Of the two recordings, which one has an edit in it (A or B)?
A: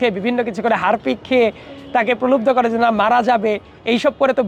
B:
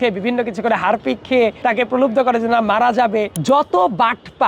B